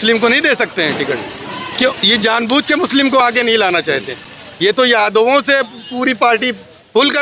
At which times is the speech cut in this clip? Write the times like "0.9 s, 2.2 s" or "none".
none